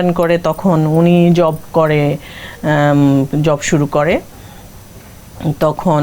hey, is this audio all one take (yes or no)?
yes